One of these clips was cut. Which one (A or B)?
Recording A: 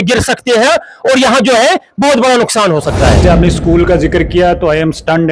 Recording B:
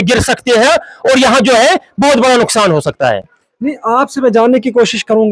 A